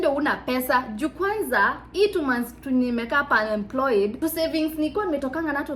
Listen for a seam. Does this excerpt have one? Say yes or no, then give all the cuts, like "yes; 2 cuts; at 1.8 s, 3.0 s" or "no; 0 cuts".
no; 0 cuts